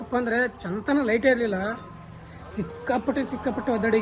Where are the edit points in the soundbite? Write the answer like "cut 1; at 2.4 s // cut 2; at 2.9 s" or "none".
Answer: none